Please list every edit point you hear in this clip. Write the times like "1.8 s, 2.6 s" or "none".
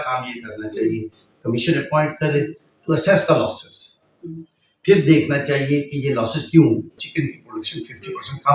7.0 s